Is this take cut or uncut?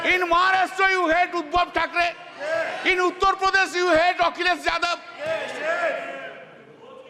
uncut